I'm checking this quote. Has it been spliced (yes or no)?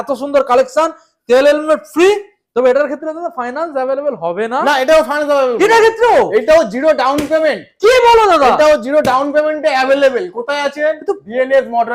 no